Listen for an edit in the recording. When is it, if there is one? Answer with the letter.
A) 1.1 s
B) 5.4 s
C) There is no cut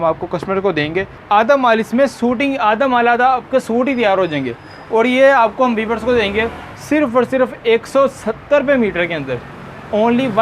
A